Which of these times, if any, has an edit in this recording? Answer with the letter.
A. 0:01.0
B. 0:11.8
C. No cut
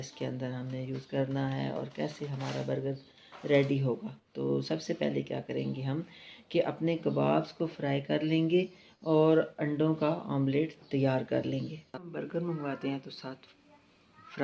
B